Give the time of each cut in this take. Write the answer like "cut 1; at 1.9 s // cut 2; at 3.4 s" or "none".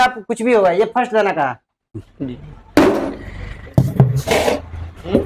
cut 1; at 1.8 s